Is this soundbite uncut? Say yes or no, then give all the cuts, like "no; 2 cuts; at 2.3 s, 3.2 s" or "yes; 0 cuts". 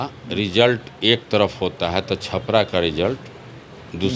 yes; 0 cuts